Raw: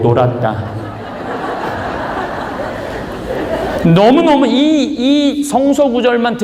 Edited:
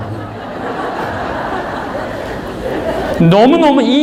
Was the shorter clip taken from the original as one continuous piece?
yes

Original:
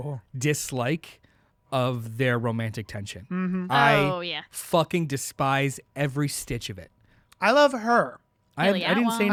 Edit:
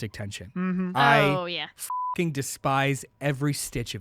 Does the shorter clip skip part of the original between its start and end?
no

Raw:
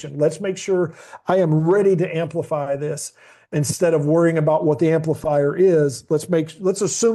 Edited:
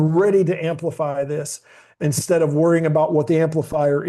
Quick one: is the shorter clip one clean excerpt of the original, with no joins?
yes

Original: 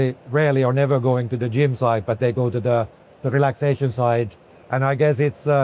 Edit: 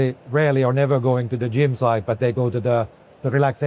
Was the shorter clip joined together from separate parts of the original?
no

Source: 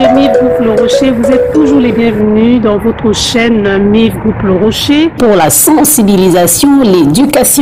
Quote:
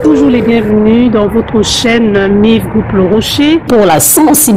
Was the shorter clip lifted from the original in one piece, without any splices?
yes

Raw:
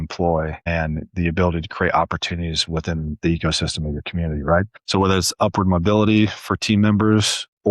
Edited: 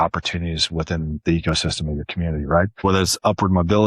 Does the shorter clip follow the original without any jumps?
no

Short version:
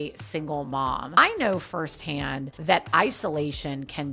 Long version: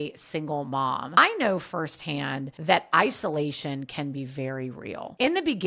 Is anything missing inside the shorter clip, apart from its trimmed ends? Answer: no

